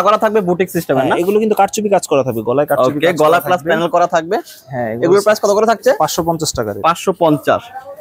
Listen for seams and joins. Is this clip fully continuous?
yes; 0 cuts

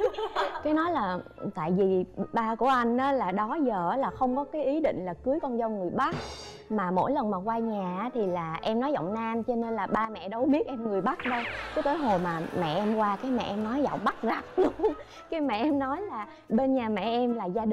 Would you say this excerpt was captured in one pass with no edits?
yes; 0 cuts

